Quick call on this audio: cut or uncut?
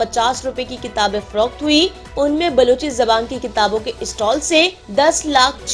cut